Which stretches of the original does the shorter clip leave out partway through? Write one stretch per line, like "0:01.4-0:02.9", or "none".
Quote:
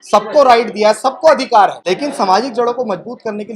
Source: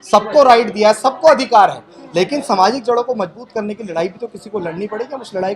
0:01.8-0:02.1